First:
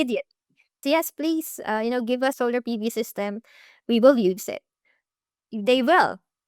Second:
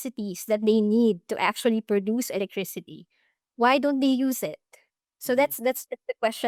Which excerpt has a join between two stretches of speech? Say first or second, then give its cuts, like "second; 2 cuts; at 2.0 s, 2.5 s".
first; 2 cuts; at 0.8 s, 2.4 s